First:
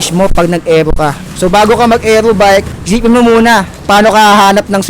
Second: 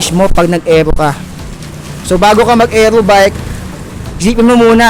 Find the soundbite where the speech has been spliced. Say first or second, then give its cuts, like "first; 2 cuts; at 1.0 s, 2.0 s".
first; 3 cuts; at 1.2 s, 2.8 s, 3.7 s